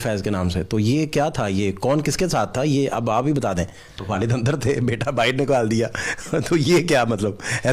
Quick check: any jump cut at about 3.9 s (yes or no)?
yes